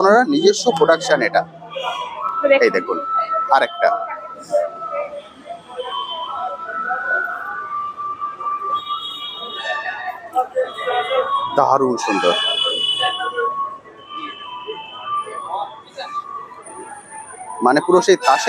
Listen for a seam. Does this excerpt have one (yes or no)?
no